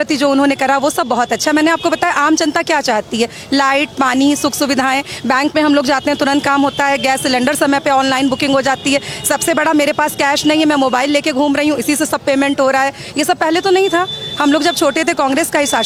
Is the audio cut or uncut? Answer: uncut